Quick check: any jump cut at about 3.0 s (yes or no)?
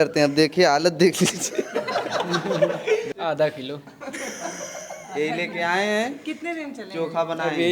yes